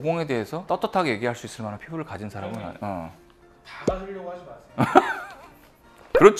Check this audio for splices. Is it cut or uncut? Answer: uncut